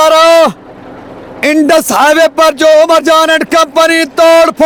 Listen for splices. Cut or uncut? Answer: uncut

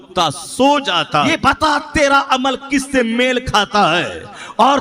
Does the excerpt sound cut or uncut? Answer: cut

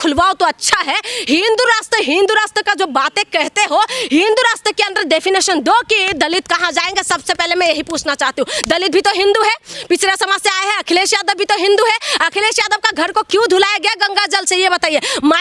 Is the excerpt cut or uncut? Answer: uncut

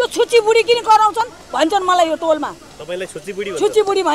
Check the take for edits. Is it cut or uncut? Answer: uncut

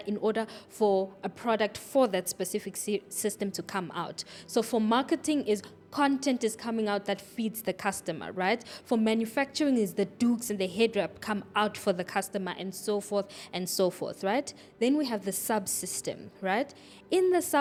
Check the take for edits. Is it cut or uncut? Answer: uncut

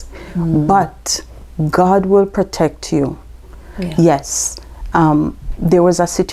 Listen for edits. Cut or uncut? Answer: uncut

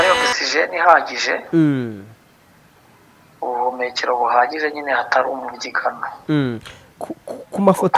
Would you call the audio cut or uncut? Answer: uncut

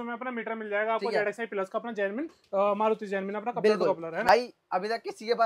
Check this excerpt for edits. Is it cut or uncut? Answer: cut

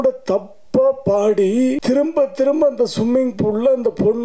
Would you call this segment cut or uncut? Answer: cut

